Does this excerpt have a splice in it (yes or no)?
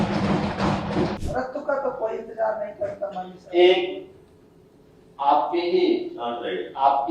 yes